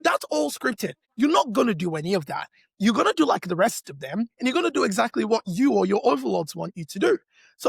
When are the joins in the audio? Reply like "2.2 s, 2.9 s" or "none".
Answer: 1.0 s